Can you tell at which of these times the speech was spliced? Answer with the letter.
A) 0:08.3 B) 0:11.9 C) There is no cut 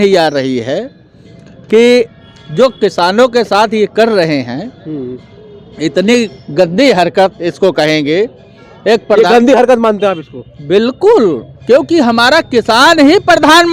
C